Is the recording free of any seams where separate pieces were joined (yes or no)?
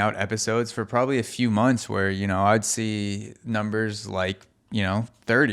yes